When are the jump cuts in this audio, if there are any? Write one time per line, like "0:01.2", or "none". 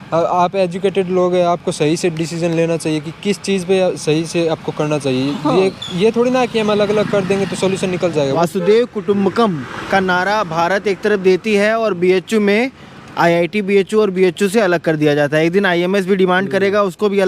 0:08.4